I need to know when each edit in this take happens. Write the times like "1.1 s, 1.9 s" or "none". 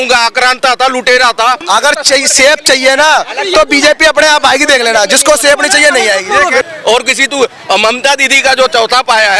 1.6 s, 6.6 s